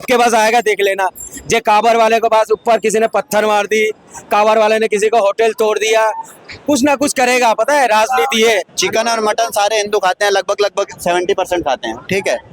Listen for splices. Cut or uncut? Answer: cut